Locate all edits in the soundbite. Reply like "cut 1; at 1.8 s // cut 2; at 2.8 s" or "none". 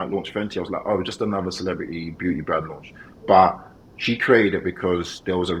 none